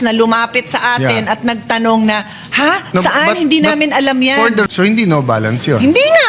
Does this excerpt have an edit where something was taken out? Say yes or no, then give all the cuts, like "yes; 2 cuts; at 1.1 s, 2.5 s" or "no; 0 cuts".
yes; 1 cut; at 4.7 s